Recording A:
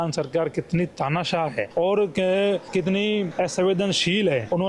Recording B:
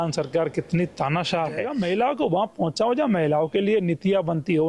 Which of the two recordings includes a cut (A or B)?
B